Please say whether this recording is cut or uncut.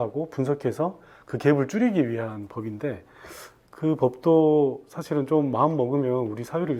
uncut